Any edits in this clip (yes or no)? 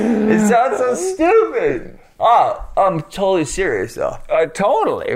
no